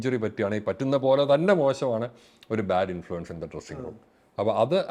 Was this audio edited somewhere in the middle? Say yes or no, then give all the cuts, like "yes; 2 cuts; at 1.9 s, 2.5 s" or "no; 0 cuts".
no; 0 cuts